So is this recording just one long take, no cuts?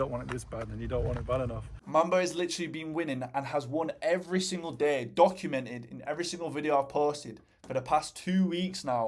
no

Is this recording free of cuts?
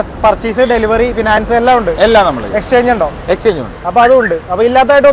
yes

